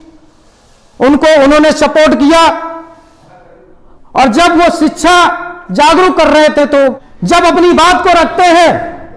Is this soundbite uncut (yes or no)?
no